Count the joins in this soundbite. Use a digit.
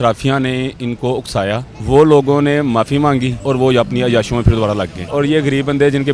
3